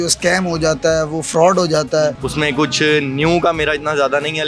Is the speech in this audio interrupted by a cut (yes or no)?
yes